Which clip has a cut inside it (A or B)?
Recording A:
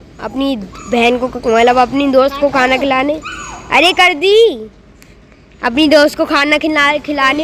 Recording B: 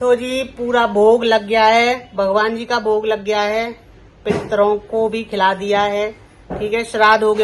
A